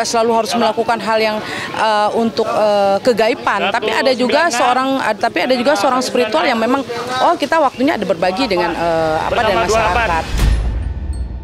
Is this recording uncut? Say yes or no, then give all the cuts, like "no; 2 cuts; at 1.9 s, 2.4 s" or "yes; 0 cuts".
no; 1 cut; at 10.3 s